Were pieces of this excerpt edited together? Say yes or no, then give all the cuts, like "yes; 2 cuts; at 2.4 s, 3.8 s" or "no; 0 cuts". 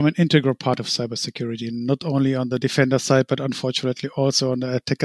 no; 0 cuts